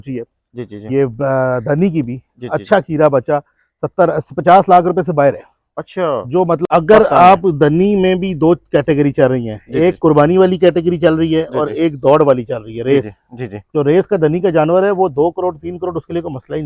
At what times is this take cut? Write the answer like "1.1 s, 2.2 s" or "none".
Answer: 6.6 s